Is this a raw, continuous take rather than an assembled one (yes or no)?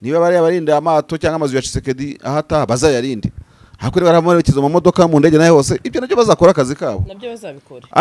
yes